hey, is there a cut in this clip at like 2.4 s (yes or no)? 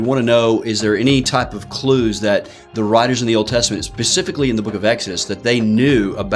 no